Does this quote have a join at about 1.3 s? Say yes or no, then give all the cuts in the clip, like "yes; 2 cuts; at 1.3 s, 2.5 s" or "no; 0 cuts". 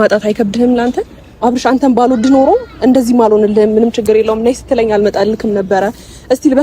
yes; 1 cut; at 1.3 s